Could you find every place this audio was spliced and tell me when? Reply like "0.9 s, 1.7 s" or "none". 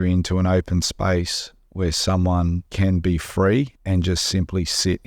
2.7 s, 3.8 s